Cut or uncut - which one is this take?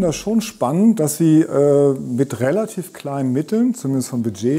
uncut